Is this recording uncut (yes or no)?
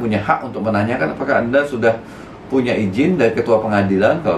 yes